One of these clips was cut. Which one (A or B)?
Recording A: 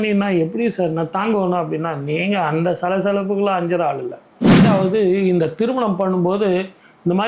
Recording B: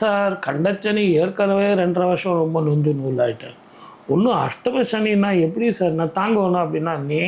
A